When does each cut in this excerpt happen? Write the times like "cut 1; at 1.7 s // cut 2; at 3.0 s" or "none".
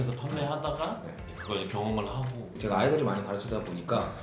cut 1; at 1.2 s // cut 2; at 2.5 s